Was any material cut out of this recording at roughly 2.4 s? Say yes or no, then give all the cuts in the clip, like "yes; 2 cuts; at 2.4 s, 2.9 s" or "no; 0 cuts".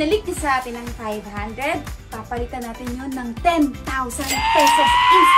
no; 1 cut; at 4.4 s